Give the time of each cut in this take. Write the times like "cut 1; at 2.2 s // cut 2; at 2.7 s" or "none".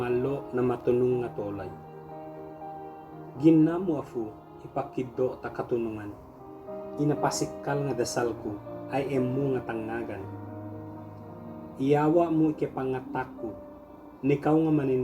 cut 1; at 1.7 s // cut 2; at 3.3 s // cut 3; at 10.3 s // cut 4; at 11.7 s